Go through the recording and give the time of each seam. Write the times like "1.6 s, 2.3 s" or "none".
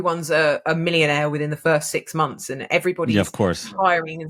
none